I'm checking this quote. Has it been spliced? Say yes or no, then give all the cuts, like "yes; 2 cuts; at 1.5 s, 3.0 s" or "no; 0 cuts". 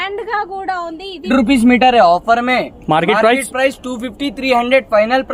yes; 1 cut; at 1.3 s